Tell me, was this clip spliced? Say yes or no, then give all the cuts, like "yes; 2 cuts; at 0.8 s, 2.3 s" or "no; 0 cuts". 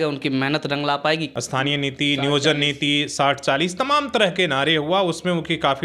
yes; 1 cut; at 1.3 s